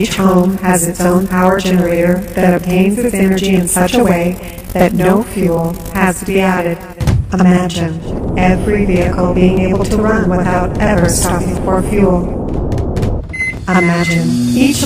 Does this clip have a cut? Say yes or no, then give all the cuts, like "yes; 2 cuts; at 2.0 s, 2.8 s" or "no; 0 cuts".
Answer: no; 0 cuts